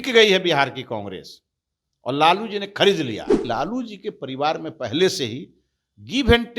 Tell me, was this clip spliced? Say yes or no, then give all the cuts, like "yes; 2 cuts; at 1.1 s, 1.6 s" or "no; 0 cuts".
yes; 1 cut; at 3.4 s